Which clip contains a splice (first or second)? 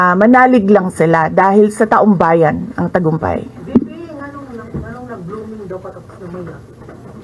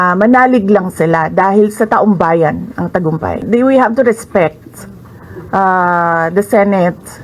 second